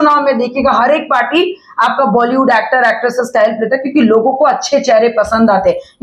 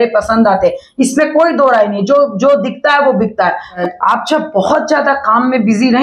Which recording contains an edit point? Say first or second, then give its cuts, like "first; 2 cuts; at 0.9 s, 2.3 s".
second; 1 cut; at 3.8 s